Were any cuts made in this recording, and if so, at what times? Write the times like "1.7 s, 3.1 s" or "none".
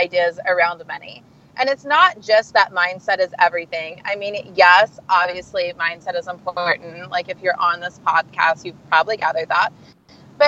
none